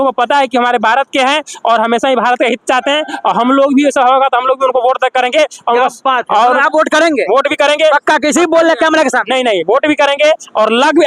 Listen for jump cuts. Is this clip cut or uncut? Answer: uncut